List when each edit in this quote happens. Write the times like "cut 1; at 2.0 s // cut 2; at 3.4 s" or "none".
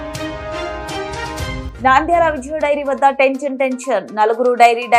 none